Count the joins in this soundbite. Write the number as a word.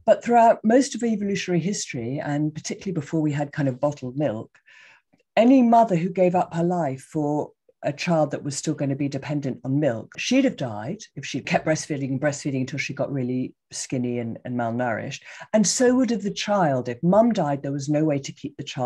two